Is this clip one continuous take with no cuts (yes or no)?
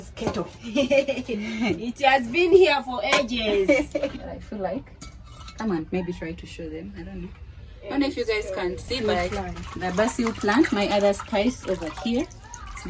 no